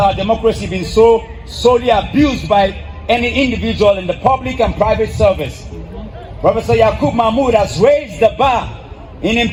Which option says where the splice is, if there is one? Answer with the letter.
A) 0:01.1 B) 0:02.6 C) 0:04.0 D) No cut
D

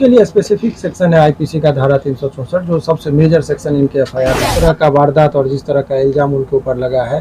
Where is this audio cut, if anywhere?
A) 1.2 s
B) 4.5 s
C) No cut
B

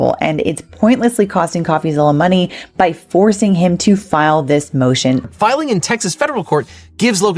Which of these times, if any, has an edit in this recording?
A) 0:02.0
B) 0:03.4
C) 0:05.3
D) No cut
C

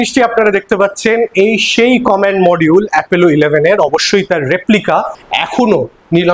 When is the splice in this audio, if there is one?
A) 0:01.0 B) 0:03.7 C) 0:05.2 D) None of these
C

